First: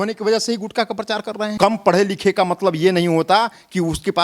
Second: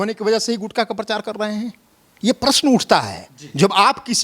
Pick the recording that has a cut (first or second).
first